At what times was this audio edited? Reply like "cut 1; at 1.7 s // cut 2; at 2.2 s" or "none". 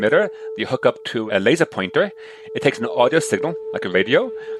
none